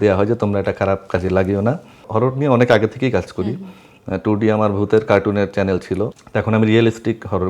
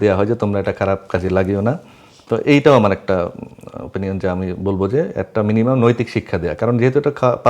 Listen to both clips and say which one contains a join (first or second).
first